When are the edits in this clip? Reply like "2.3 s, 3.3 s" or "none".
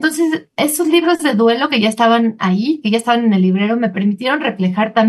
none